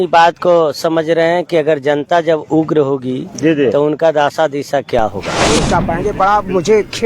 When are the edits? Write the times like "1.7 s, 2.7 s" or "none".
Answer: 5.5 s